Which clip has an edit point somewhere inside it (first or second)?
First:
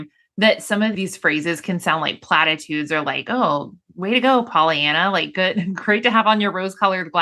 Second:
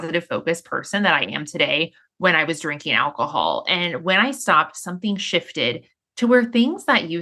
first